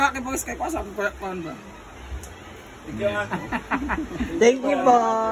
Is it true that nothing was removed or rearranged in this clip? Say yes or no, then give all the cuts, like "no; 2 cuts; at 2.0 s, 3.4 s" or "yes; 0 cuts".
yes; 0 cuts